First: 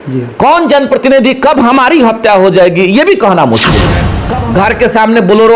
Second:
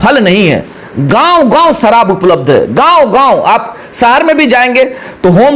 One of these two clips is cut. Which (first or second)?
first